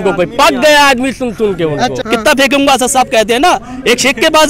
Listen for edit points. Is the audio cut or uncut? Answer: cut